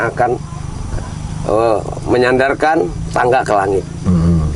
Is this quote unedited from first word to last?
yes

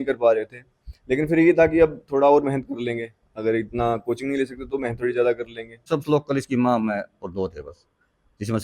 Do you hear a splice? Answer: yes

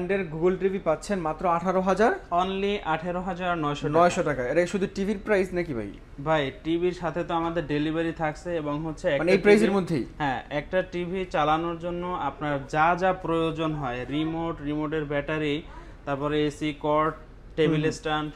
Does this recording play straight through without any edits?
yes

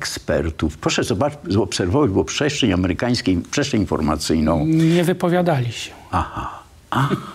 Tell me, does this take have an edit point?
no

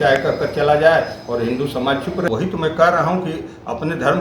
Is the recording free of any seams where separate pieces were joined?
no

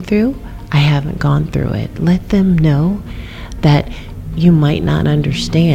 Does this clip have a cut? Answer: no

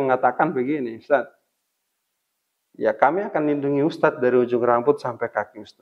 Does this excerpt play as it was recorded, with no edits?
yes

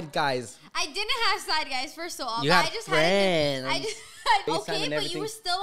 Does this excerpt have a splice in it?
yes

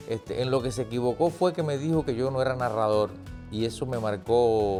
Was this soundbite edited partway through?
no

